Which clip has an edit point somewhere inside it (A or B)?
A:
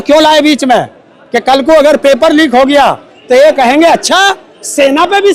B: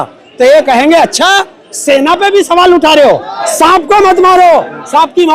B